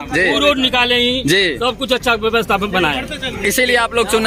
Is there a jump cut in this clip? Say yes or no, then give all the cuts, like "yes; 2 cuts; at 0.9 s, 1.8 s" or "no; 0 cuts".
no; 0 cuts